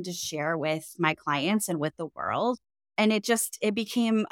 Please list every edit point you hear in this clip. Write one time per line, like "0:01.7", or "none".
0:02.9